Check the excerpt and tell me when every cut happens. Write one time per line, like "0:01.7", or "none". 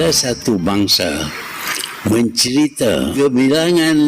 0:03.1